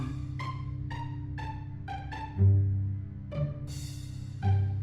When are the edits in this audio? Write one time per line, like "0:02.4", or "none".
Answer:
none